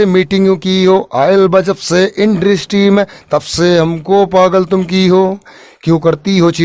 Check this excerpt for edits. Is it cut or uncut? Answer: uncut